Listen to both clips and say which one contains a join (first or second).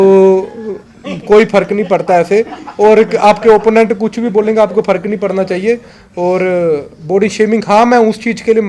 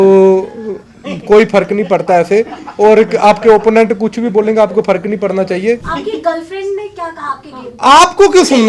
second